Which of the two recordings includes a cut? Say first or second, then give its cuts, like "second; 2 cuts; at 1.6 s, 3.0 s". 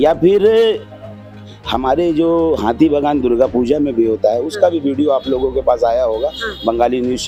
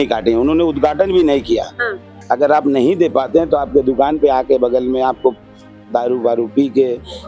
second; 1 cut; at 2.1 s